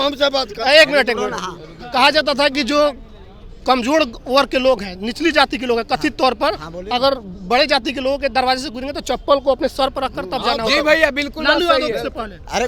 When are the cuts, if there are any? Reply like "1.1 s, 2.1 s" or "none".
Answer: none